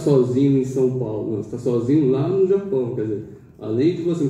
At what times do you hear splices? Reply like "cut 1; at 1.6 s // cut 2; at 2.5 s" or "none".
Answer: none